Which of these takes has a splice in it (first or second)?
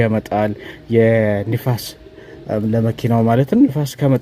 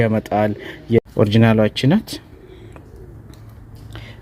second